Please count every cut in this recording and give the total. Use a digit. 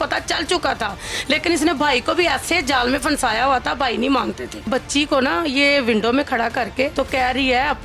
2